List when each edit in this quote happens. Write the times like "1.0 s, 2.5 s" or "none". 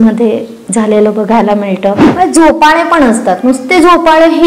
2.0 s